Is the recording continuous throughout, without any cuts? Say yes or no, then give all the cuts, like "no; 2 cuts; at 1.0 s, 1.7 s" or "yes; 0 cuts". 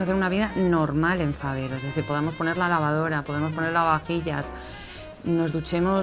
yes; 0 cuts